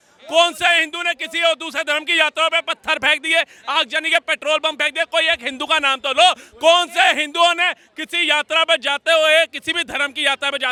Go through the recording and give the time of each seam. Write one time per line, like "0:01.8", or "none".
none